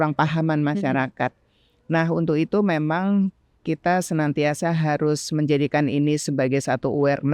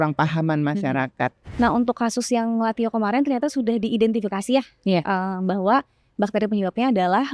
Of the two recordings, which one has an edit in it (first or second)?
second